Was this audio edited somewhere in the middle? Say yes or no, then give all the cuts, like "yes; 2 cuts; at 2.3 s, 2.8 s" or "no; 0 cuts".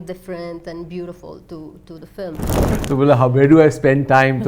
yes; 1 cut; at 2.7 s